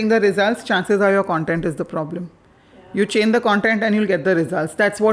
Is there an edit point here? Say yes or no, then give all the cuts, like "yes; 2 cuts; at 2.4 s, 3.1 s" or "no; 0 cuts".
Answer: no; 0 cuts